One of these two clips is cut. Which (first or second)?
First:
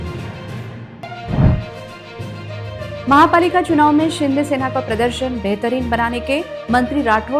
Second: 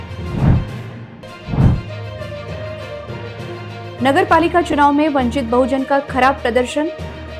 first